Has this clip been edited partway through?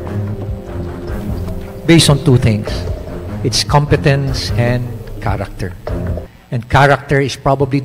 yes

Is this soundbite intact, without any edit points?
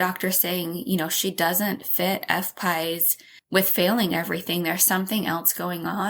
yes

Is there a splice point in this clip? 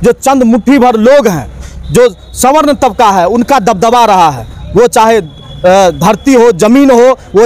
no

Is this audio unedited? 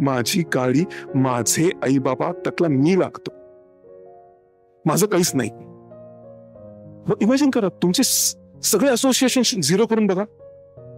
yes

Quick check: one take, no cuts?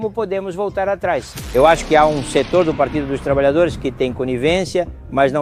no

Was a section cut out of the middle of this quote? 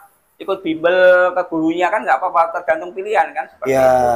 no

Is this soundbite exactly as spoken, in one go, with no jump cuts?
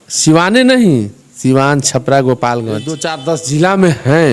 no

